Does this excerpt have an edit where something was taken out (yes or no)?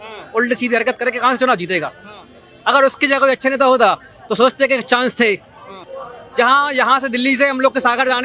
yes